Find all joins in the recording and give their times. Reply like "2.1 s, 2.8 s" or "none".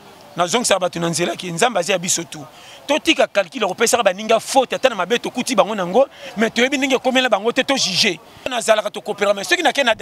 8.6 s